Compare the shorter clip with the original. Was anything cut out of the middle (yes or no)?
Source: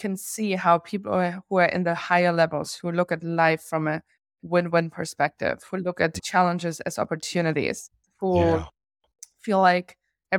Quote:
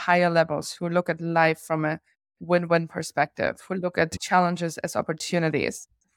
no